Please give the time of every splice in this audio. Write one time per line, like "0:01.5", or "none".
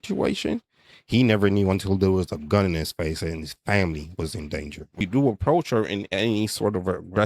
0:05.0

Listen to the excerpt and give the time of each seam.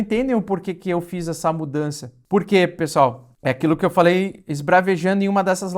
none

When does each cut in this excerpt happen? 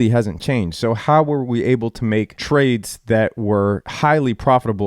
0:02.4
0:03.9

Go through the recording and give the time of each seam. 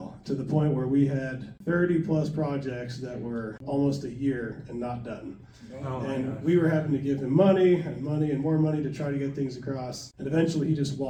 none

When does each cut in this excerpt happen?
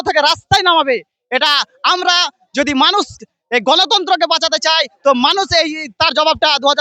none

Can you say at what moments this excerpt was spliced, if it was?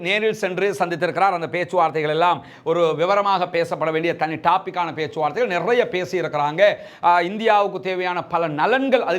none

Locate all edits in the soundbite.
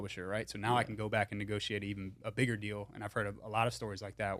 none

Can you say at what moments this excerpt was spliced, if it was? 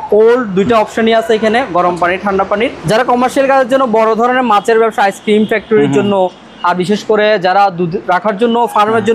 0:02.8

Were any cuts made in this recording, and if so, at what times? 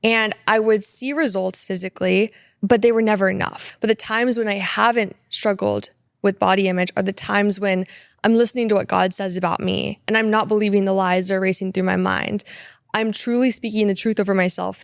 0:02.4
0:03.6

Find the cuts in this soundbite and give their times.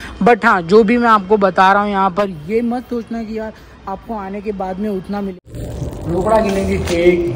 0:05.4

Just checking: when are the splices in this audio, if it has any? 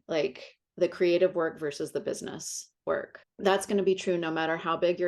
0:03.2

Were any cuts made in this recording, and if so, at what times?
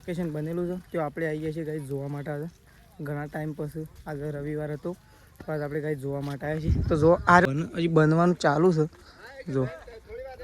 0:07.4

